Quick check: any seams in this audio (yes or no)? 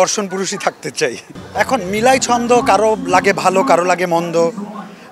yes